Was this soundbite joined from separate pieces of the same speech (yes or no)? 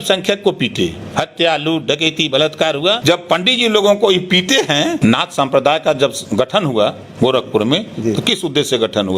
yes